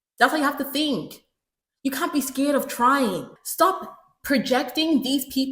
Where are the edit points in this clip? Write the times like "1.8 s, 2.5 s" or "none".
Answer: 3.4 s